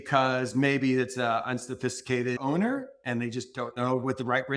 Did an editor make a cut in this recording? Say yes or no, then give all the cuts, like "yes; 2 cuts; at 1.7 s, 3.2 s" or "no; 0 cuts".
yes; 1 cut; at 2.4 s